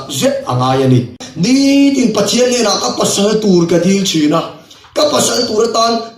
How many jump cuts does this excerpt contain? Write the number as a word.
one